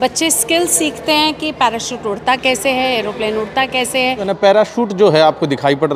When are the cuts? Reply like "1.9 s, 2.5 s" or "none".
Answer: 4.3 s